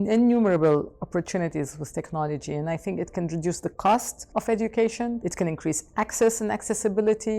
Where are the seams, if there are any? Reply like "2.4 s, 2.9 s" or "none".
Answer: 4.2 s, 5.2 s